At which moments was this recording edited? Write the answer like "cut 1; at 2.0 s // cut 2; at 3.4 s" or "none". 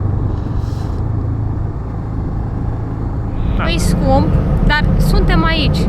cut 1; at 3.5 s